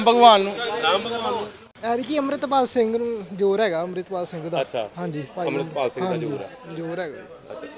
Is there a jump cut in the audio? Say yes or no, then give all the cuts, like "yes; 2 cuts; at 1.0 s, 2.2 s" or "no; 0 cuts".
yes; 1 cut; at 1.6 s